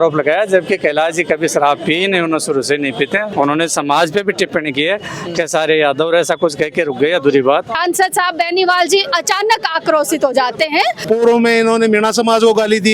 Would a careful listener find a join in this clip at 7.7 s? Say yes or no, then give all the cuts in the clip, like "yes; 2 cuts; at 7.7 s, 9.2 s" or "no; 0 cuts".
yes; 3 cuts; at 3.3 s, 7.7 s, 11.0 s